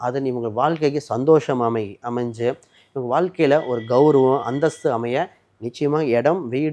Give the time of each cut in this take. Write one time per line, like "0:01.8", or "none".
none

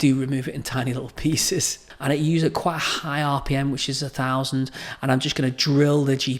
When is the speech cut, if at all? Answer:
0:01.8

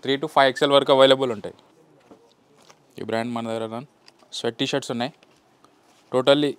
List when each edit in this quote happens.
0:01.7

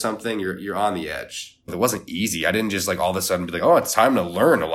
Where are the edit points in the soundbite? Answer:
0:01.7

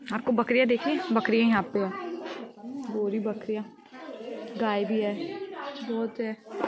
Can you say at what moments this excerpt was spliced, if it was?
none

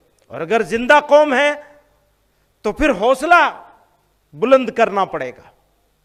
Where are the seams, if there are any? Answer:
none

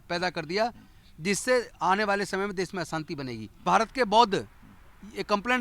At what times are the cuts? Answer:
0:03.6

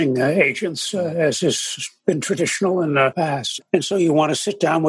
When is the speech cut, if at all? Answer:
0:03.3

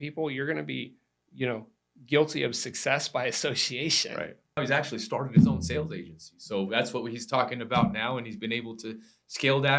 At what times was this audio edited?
0:04.6

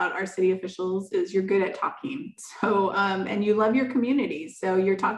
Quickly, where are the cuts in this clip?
none

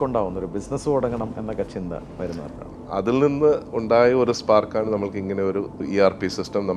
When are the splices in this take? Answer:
0:02.7
0:05.8

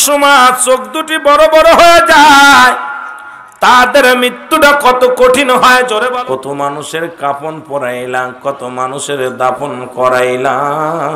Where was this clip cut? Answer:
0:06.0

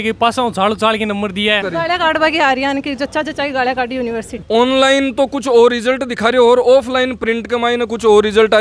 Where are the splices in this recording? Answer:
0:01.6
0:04.4

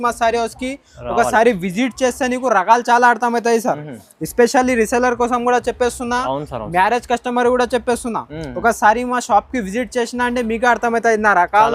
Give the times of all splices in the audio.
none

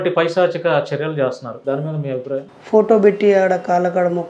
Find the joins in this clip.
0:01.5
0:02.6

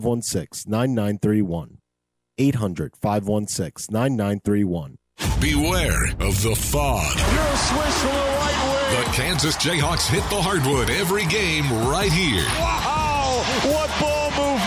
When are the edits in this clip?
0:05.0

